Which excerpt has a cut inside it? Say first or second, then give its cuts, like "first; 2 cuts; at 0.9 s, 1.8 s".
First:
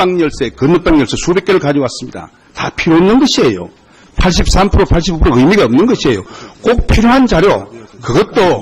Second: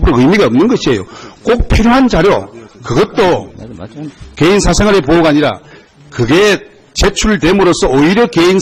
first; 1 cut; at 3.5 s